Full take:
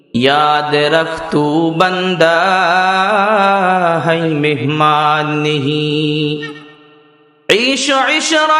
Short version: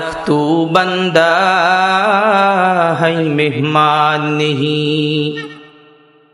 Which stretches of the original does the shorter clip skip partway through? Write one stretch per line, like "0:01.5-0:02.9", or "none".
none